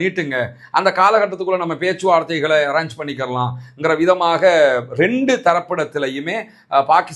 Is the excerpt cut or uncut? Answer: uncut